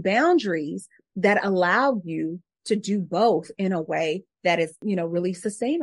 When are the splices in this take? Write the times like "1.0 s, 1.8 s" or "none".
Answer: 4.8 s